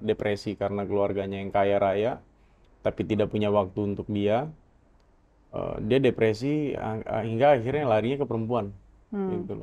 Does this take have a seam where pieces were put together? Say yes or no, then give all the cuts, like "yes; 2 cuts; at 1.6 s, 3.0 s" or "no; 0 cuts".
no; 0 cuts